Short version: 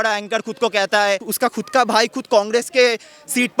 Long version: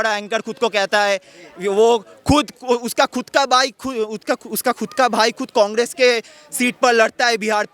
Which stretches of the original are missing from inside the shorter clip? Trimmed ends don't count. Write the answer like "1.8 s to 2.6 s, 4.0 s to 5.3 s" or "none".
1.3 s to 4.5 s